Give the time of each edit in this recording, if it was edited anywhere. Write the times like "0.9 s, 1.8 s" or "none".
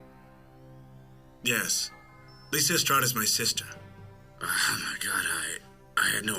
1.8 s